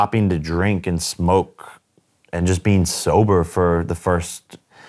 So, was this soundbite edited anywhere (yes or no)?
no